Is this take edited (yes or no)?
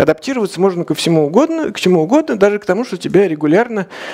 no